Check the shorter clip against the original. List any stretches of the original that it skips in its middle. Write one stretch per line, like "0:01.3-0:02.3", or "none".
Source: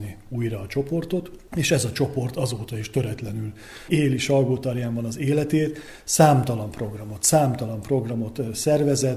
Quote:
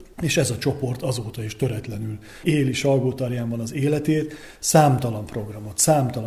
0:03.6-0:03.7